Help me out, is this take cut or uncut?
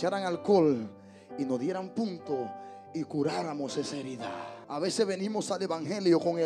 cut